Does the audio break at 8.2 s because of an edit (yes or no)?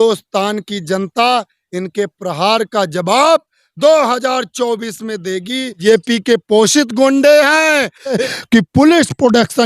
yes